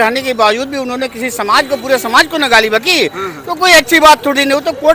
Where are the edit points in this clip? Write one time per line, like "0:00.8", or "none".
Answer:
none